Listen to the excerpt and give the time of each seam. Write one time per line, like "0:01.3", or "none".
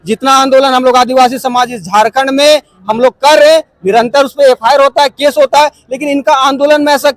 none